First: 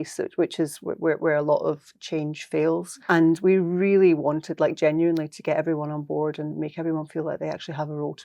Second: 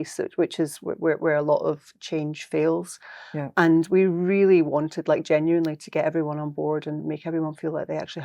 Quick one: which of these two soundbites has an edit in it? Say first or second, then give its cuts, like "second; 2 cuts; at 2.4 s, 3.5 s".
first; 1 cut; at 2.9 s